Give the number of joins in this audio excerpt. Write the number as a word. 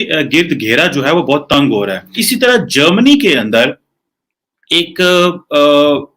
one